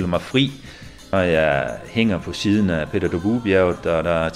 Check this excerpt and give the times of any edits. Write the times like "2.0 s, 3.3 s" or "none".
1.1 s